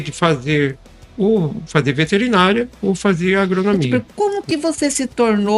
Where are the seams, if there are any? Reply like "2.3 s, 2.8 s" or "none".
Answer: 3.9 s